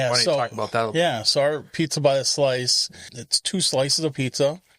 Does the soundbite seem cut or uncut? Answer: cut